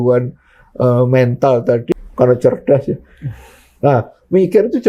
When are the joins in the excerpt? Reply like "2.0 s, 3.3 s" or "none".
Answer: 1.8 s